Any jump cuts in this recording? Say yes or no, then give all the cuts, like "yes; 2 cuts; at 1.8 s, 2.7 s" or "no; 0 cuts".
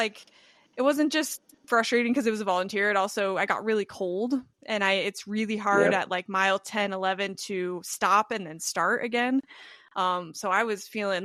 no; 0 cuts